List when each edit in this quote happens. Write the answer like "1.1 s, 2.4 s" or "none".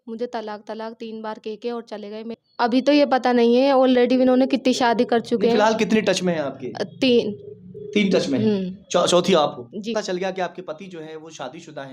2.4 s, 9.9 s